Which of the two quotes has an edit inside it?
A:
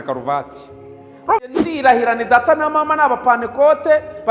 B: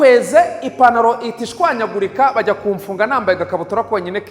A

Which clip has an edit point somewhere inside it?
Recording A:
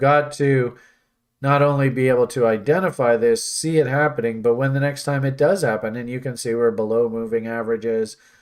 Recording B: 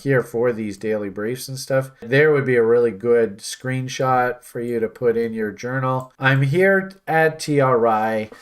B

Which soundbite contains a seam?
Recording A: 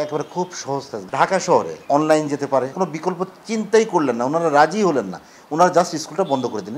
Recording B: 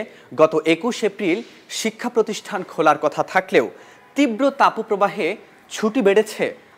A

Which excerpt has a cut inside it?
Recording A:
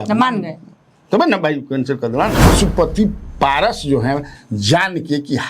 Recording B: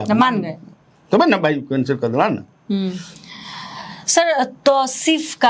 A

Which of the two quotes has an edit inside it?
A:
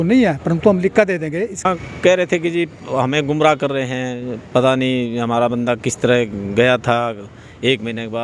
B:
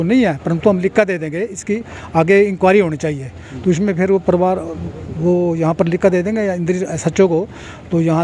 A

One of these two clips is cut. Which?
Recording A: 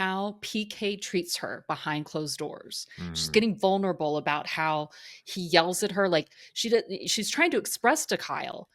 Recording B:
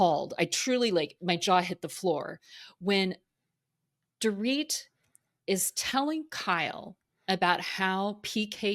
A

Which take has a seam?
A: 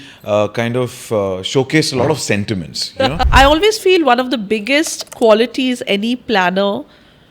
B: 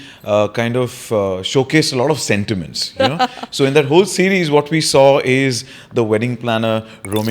A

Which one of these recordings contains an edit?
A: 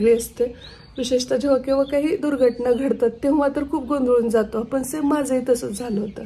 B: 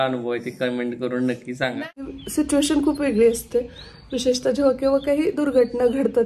B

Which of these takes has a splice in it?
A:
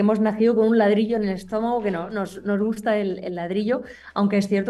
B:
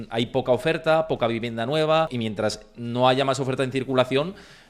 B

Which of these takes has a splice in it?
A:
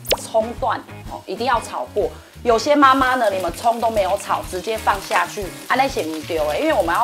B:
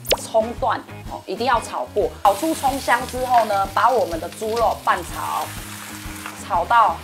B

